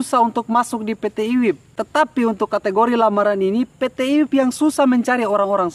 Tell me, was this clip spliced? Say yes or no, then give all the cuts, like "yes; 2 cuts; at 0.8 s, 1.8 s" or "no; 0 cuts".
yes; 1 cut; at 1.7 s